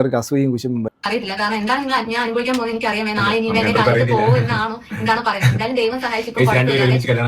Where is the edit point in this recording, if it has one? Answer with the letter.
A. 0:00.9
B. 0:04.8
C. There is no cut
A